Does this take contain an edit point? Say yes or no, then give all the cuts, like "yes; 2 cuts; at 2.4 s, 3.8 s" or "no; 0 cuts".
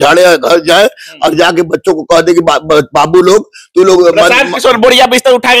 no; 0 cuts